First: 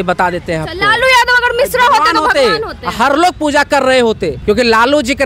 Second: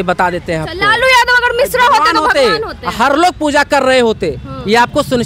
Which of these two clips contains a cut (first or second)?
first